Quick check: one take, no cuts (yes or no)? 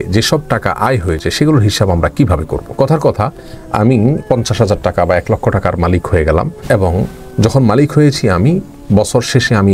no